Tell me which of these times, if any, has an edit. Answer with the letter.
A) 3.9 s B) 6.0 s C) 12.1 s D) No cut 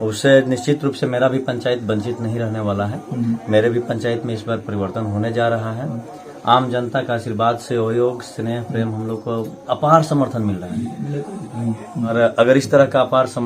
C